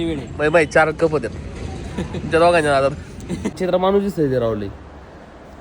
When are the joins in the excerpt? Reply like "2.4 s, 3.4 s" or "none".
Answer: 3.6 s